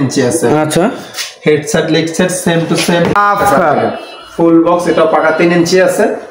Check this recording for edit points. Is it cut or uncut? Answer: cut